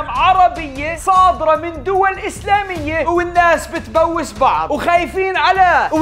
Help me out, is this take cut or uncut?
cut